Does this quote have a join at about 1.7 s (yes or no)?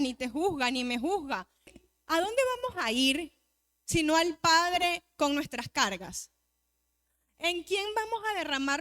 yes